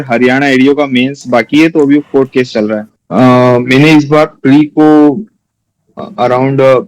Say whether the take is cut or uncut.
cut